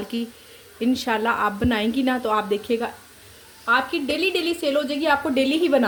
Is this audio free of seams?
yes; 0 cuts

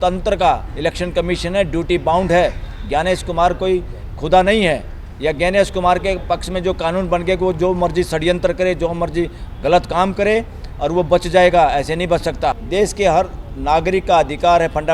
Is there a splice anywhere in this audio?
yes; 1 cut; at 12.6 s

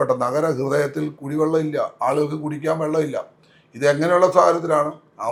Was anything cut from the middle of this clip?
no; 0 cuts

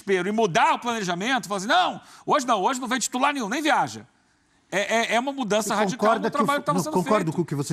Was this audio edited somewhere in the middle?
no; 0 cuts

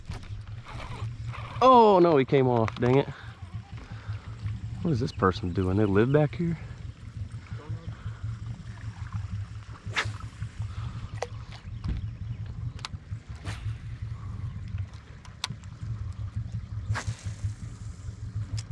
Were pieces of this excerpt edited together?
no; 0 cuts

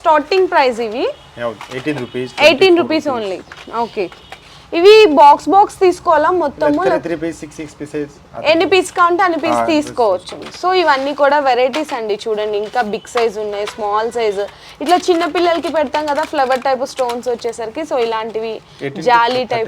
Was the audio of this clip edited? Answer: no; 0 cuts

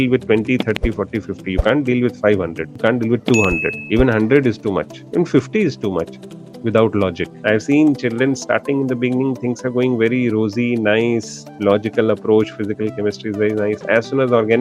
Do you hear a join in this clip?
yes; 3 cuts; at 2.6 s, 3.8 s, 7.3 s

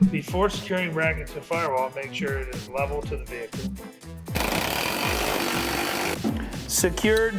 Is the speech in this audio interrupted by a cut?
yes; 2 cuts; at 4.3 s, 6.1 s

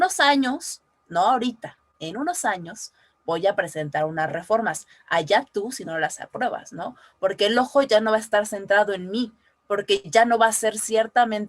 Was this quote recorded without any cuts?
yes; 0 cuts

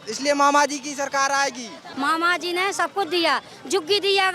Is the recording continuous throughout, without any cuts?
no; 1 cut; at 1.8 s

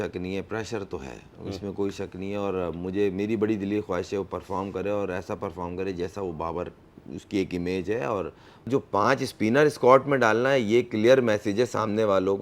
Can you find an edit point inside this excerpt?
yes; 1 cut; at 8.7 s

